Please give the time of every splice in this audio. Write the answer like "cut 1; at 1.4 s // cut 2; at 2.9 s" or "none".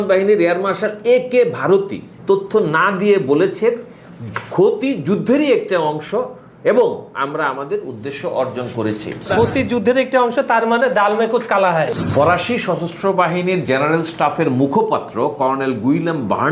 cut 1; at 2.1 s // cut 2; at 9.3 s // cut 3; at 11.9 s